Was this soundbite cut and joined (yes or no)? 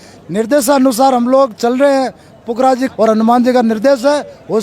yes